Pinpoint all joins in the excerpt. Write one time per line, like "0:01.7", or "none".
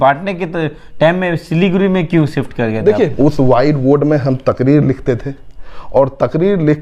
0:03.1